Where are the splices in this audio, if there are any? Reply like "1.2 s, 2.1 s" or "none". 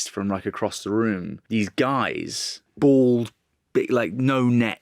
1.3 s, 2.6 s